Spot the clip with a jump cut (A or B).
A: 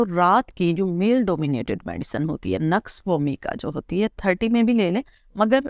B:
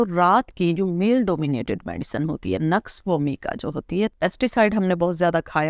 B